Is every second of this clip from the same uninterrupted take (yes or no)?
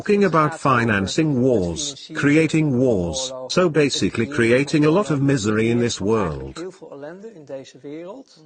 yes